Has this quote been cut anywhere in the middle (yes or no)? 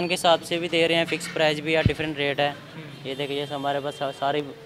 no